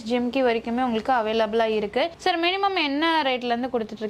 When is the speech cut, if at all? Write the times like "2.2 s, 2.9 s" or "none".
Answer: none